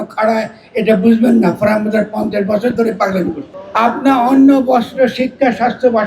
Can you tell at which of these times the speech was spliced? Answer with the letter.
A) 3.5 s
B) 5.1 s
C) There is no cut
A